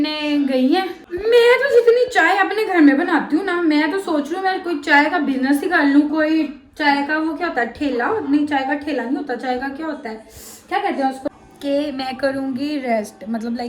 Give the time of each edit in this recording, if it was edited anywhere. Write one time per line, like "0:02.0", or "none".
0:01.0
0:11.3